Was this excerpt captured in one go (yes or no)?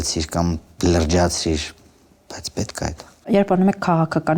no